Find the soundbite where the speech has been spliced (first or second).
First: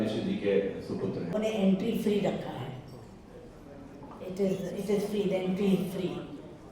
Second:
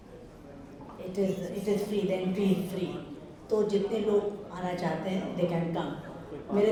first